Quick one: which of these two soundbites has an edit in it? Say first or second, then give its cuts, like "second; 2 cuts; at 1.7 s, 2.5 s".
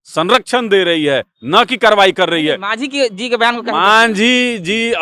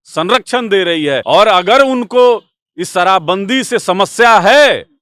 second; 1 cut; at 1.2 s